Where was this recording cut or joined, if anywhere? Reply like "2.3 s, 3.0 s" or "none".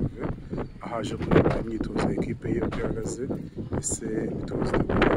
none